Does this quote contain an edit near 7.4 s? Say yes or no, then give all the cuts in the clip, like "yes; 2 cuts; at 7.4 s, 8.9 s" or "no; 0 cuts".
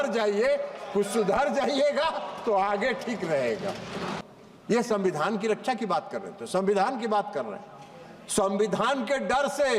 no; 1 cut; at 4.2 s